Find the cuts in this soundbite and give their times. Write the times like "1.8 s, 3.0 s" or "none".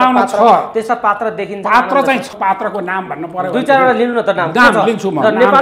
2.3 s

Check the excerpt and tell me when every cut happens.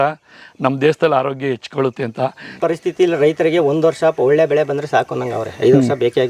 2.6 s

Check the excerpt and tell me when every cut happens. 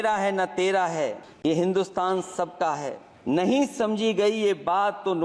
1.3 s, 3.0 s

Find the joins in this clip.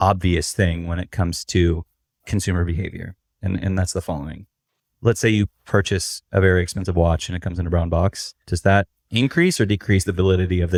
none

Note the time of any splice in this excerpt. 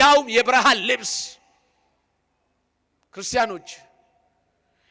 none

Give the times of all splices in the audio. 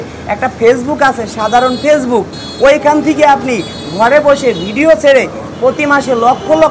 none

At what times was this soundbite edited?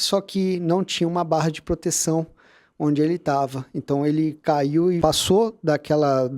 5.0 s

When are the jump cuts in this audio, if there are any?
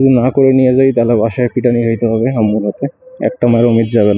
none

